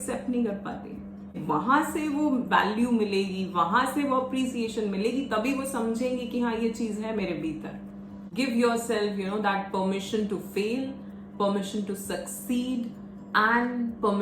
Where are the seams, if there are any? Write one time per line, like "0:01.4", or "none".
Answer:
0:01.4
0:08.3